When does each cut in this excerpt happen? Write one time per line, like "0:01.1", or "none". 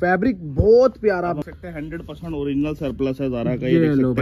0:01.4